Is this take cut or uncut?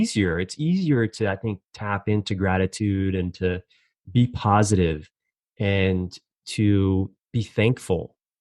cut